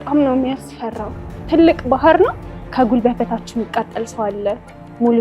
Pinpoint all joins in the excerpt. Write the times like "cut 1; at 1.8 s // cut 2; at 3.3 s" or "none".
cut 1; at 2.6 s